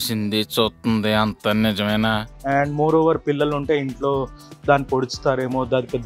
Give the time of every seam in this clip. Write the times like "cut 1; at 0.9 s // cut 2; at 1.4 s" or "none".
cut 1; at 2.3 s